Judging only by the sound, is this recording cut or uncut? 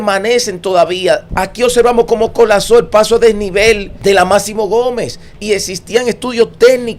cut